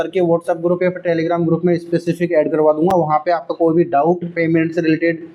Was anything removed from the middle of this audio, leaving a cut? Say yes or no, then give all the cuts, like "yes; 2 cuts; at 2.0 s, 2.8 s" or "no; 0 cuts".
no; 0 cuts